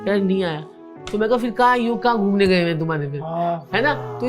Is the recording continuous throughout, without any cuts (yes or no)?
yes